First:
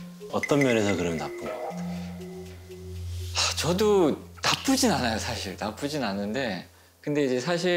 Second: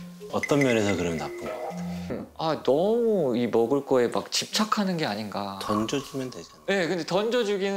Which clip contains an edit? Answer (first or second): second